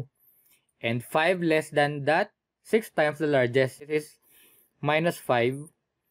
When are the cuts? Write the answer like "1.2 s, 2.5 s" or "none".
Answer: 3.9 s